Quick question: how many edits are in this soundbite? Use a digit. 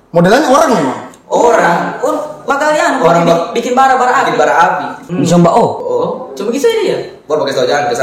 2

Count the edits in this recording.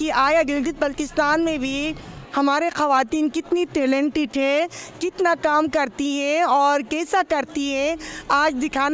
0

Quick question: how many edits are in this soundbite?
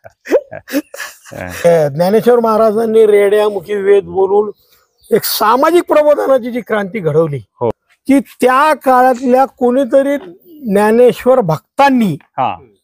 2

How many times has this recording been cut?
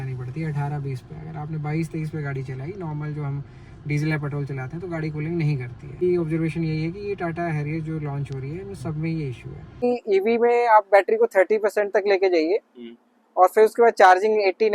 2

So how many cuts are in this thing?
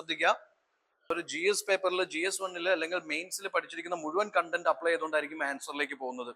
1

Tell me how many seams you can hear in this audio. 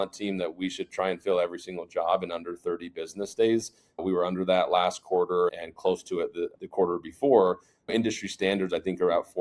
0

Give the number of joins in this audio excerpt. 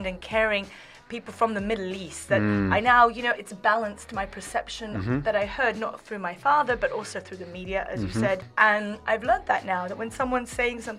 1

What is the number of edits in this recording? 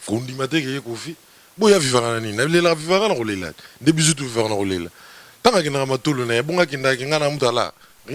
0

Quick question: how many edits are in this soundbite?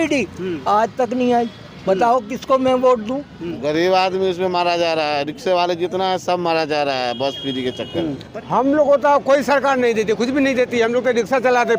2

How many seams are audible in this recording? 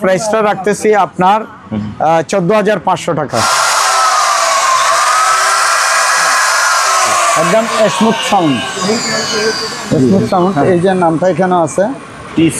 1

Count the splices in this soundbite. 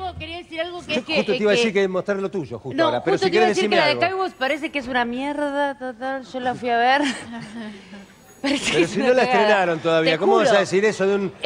0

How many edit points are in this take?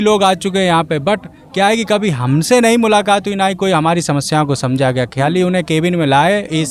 0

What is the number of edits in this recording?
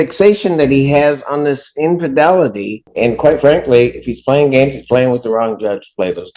1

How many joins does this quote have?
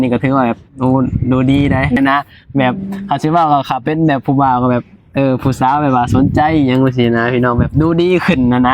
1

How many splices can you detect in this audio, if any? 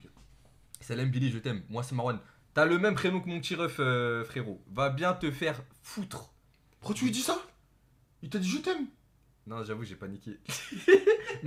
0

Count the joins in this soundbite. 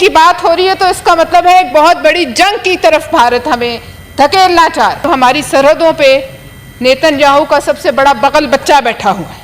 1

